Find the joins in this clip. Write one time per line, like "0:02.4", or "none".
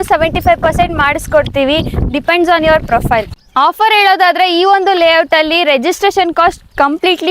0:03.5